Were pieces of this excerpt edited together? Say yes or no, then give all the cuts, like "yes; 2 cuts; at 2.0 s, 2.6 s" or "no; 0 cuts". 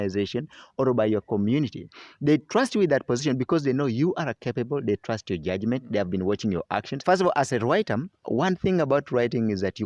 yes; 1 cut; at 7.0 s